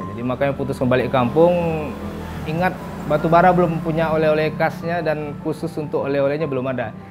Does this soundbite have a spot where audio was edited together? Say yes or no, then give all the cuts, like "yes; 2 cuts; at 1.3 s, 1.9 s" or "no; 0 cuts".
no; 0 cuts